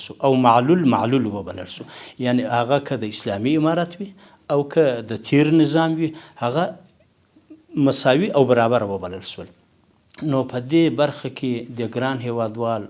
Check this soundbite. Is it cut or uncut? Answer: uncut